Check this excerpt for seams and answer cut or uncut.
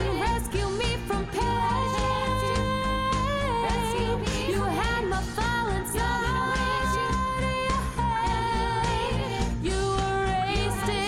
uncut